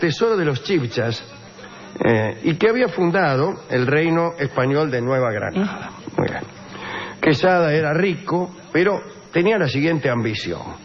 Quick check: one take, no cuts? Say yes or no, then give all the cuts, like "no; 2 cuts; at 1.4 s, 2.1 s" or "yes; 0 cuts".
no; 1 cut; at 7.0 s